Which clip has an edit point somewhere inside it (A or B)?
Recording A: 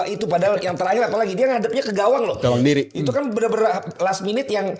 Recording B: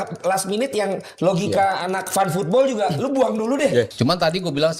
B